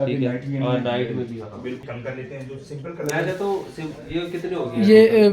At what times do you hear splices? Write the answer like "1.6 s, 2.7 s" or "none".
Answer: 1.8 s